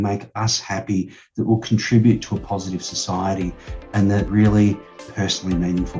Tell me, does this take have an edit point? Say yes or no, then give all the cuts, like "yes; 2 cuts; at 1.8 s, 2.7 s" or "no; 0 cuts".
yes; 2 cuts; at 4.3 s, 5.0 s